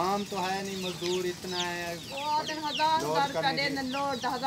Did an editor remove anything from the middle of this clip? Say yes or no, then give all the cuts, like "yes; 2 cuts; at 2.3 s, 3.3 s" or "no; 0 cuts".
yes; 1 cut; at 2.1 s